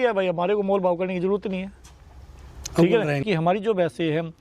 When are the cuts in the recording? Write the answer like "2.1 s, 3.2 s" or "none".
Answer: 3.2 s